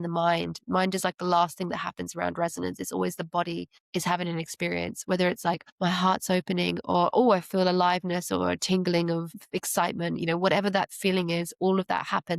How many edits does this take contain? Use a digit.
3